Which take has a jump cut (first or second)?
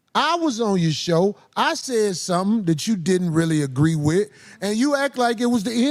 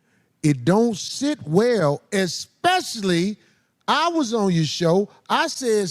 second